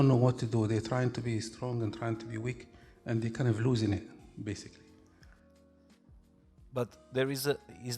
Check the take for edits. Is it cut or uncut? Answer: uncut